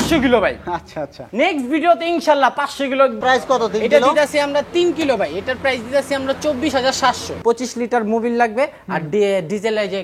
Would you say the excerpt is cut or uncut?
cut